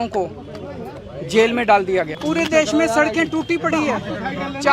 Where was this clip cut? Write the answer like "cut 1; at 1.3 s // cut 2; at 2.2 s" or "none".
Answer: cut 1; at 2.1 s